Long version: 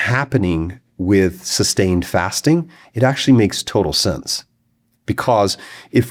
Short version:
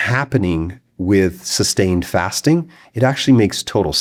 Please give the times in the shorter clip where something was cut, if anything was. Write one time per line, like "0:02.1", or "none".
none